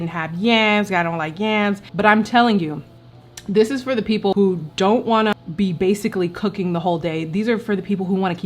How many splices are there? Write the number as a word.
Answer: three